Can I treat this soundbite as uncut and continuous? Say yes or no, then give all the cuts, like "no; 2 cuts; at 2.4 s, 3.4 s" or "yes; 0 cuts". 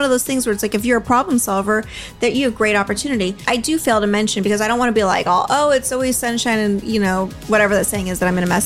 no; 2 cuts; at 3.4 s, 7.4 s